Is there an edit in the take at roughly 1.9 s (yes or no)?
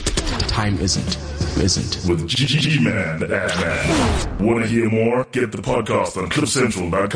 no